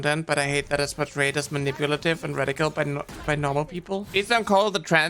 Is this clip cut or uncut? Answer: cut